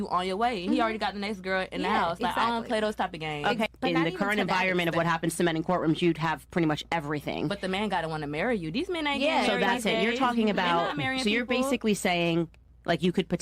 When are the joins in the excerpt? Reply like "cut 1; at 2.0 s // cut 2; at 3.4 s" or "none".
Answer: cut 1; at 3.7 s